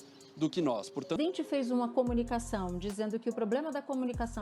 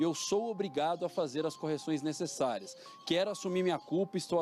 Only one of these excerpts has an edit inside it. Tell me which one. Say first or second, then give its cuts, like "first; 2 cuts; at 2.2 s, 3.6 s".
first; 1 cut; at 1.2 s